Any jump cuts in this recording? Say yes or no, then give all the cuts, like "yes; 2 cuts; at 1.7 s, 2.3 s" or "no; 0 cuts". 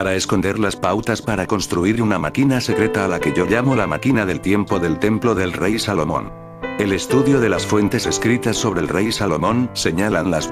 no; 0 cuts